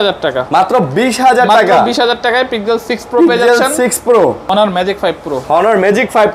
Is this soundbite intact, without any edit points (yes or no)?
no